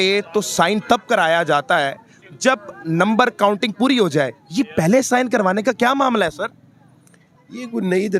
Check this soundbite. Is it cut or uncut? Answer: uncut